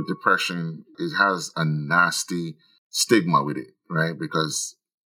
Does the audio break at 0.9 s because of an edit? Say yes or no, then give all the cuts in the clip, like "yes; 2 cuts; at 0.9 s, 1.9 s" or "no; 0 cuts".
yes; 1 cut; at 0.9 s